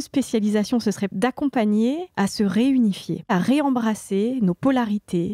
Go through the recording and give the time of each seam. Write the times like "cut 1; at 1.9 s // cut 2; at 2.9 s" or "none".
cut 1; at 3.3 s